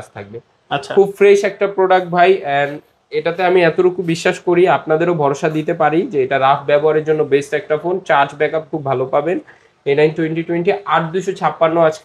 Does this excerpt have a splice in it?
no; 0 cuts

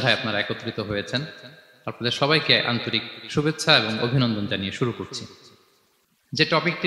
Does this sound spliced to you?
no; 0 cuts

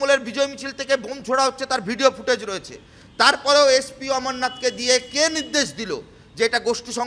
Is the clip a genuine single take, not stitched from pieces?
yes; 0 cuts

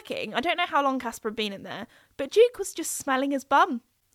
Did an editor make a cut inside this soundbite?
no; 0 cuts

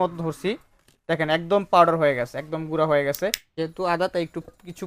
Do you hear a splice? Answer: yes; 1 cut; at 3.4 s

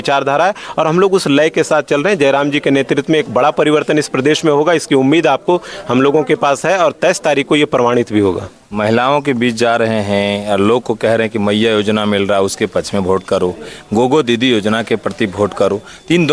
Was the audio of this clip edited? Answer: no; 0 cuts

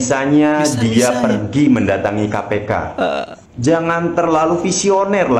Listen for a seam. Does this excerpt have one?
yes; 1 cut; at 3.4 s

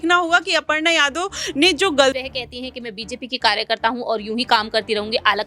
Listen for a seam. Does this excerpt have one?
yes; 1 cut; at 2.2 s

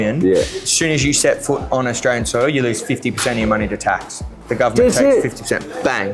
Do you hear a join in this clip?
no; 0 cuts

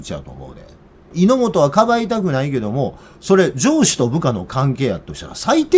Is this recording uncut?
no; 1 cut; at 1.1 s

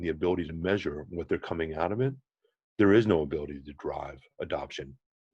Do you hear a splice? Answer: no; 0 cuts

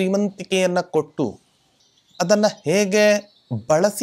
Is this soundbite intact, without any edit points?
yes; 0 cuts

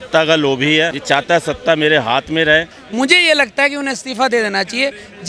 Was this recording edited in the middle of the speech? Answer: yes; 2 cuts; at 1.0 s, 2.8 s

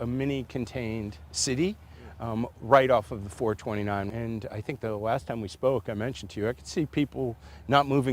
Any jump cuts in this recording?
no; 0 cuts

